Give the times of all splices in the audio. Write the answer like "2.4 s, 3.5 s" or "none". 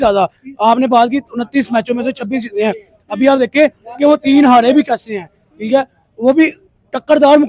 none